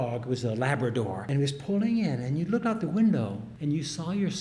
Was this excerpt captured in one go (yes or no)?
no